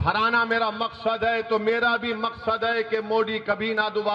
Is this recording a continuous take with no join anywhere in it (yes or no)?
yes